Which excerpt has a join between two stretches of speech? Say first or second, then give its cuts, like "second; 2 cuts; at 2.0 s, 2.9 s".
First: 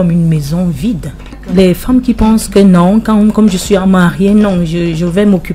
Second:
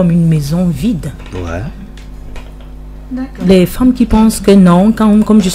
first; 1 cut; at 1.4 s